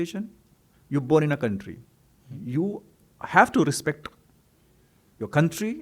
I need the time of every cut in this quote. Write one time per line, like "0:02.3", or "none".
none